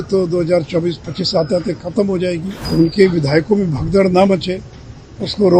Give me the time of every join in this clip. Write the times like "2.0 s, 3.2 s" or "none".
2.5 s

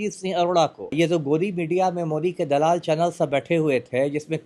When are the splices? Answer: 0.9 s

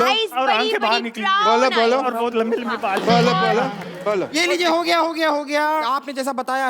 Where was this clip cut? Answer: 3.9 s

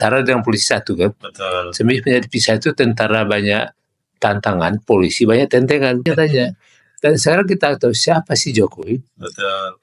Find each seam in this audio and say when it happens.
6.1 s

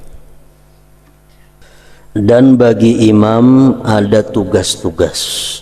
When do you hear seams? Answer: 1.6 s

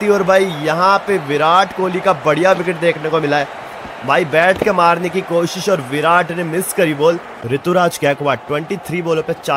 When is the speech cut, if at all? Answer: 7.4 s

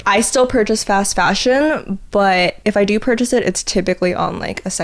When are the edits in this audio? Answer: 2.6 s

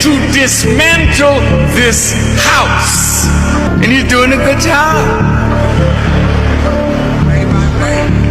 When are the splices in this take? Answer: 3.7 s

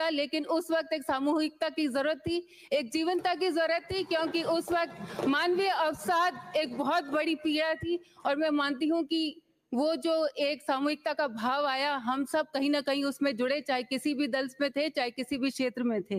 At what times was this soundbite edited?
none

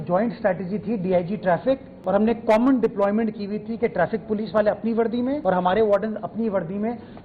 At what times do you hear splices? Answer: 1.9 s, 5.4 s

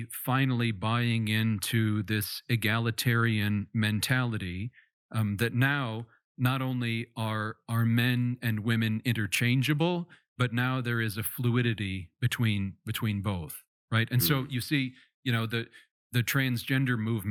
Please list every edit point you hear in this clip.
none

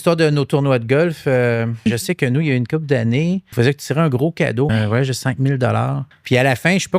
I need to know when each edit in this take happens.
1.8 s, 3.5 s, 4.7 s, 6.1 s

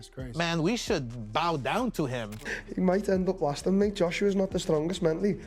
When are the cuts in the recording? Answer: 2.6 s

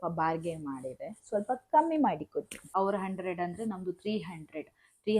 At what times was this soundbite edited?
2.6 s

